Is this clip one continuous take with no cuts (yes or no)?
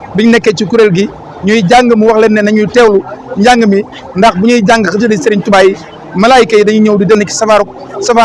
yes